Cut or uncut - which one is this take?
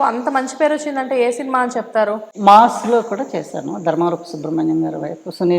cut